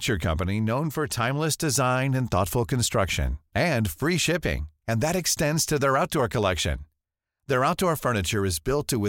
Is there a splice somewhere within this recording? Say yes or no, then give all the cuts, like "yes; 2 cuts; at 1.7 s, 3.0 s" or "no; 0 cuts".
no; 0 cuts